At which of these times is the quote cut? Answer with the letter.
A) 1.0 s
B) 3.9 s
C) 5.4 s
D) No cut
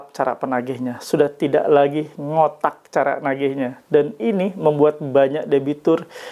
D